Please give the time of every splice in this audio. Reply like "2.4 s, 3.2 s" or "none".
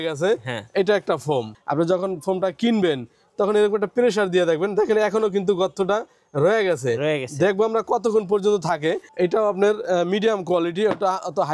1.6 s, 9.1 s